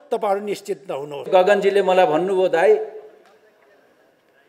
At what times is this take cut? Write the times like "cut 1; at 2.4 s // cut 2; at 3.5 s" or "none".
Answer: cut 1; at 1.2 s